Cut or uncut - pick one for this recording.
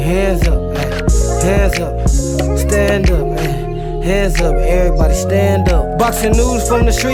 uncut